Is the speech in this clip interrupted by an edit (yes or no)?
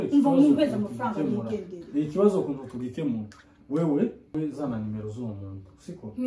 yes